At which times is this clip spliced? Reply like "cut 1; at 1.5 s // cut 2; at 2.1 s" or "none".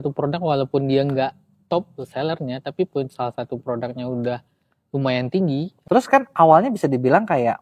cut 1; at 5.7 s